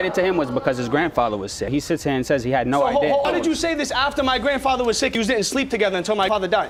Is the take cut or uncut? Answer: uncut